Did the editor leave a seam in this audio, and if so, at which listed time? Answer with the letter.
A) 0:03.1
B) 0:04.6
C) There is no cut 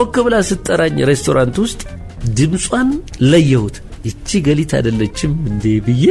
A